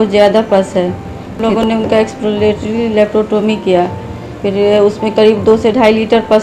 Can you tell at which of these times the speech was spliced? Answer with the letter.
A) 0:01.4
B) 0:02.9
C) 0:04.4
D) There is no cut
A